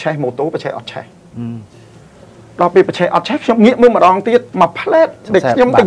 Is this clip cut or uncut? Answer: cut